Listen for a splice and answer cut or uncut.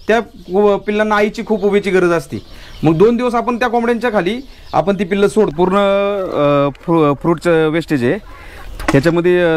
cut